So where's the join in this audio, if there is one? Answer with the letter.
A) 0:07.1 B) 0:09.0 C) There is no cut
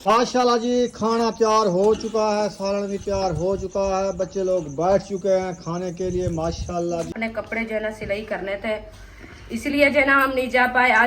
A